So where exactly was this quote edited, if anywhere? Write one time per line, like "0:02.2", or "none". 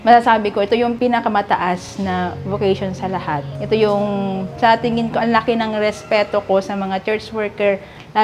none

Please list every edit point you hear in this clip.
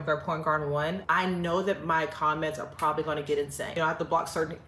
0:01.0
0:03.7

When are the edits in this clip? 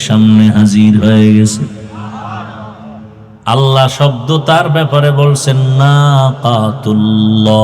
0:03.3

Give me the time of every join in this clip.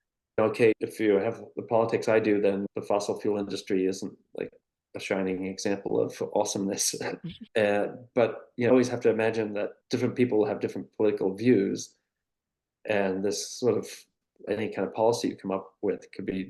none

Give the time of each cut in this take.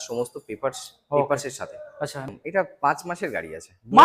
0:02.2

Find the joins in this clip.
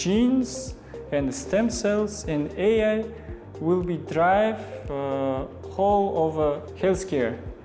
none

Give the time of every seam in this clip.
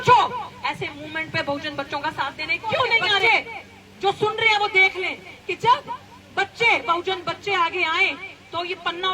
0:03.2

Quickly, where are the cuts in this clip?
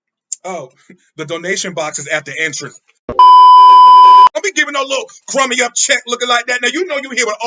0:04.3

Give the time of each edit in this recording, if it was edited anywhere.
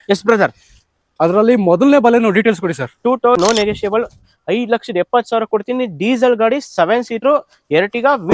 0:03.4

